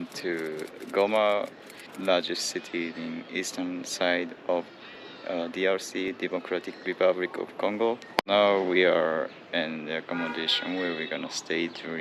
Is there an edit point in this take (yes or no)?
no